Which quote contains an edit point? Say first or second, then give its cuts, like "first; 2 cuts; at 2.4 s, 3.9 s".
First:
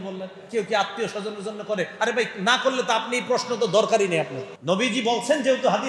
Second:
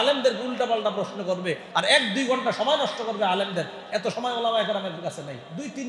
first; 1 cut; at 4.5 s